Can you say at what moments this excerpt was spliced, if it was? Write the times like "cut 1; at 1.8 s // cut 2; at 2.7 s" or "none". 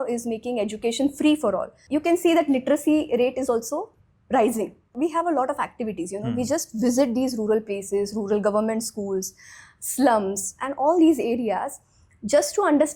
cut 1; at 1.7 s // cut 2; at 4.9 s